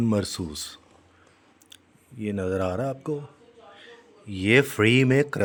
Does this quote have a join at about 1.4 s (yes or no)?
no